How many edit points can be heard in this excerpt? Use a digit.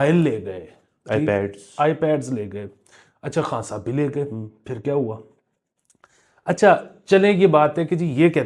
0